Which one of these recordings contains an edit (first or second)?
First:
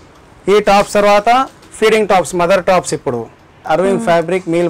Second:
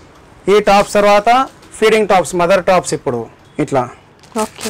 first